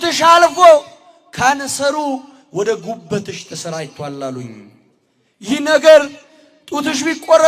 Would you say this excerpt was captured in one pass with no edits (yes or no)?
yes